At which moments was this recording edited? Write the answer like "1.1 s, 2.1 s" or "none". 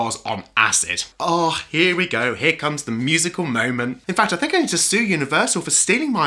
1.1 s, 4.0 s